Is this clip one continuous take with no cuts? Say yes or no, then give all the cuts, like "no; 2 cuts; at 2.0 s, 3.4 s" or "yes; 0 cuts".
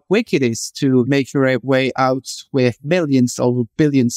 no; 2 cuts; at 1.1 s, 2.8 s